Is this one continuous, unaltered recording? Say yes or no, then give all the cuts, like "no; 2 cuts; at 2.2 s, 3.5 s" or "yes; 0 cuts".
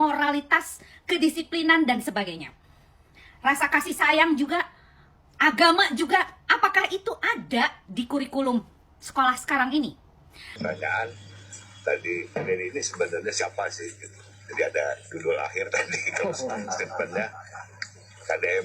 no; 1 cut; at 10.5 s